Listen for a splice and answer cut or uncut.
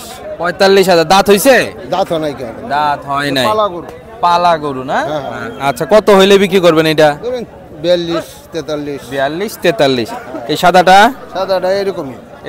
uncut